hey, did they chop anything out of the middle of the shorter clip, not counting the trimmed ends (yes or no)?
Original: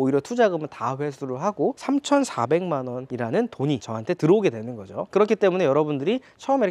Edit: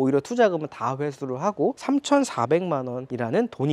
no